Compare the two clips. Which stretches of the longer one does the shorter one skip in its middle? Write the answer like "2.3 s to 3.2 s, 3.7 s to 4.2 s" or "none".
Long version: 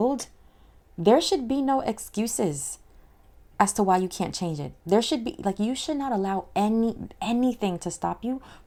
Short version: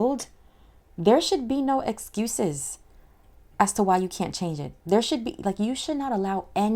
none